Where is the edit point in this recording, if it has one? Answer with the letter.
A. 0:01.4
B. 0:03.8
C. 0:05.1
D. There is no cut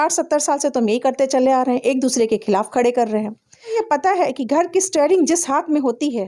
B